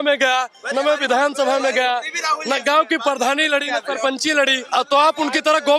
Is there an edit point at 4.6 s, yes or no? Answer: yes